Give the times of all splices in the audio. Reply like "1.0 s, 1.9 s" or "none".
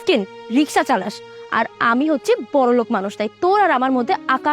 none